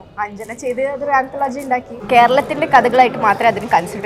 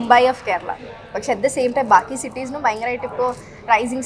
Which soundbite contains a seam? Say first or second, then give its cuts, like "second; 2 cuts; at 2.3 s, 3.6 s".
first; 1 cut; at 1.9 s